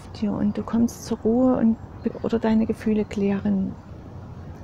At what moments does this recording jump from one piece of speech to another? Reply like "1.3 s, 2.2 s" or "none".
2.1 s